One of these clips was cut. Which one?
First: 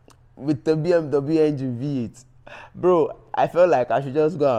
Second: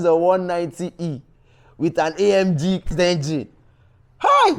second; 1 cut; at 2.9 s

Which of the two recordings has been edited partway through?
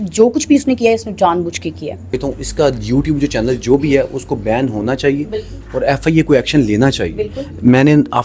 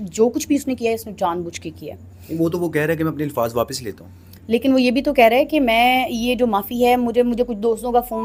first; 1 cut; at 2.2 s

